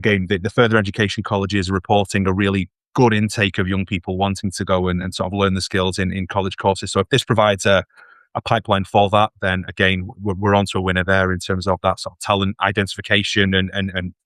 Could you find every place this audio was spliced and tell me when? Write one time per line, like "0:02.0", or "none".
none